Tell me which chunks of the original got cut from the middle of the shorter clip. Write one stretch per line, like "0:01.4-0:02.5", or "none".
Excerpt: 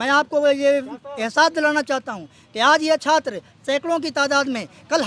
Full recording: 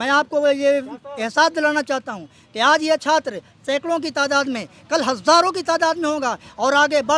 none